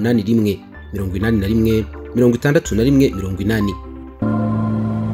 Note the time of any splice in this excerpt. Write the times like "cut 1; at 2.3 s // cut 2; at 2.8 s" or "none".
cut 1; at 4.2 s